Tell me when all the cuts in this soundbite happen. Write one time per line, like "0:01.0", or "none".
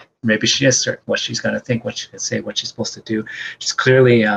0:01.0